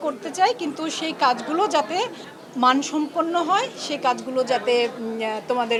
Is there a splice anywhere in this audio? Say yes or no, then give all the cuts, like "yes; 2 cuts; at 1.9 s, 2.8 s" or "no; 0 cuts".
no; 0 cuts